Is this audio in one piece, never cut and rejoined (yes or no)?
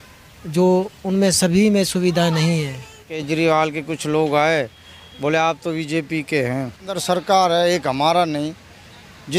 no